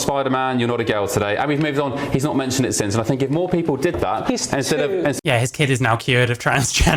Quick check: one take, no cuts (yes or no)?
yes